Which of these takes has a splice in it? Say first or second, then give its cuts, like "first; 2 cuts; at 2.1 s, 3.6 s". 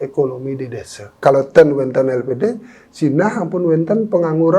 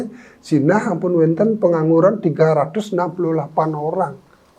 first; 1 cut; at 1.2 s